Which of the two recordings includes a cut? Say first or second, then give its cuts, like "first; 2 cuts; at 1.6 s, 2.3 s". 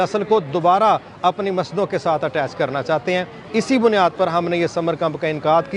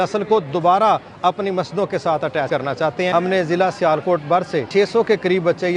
second; 2 cuts; at 2.6 s, 4.7 s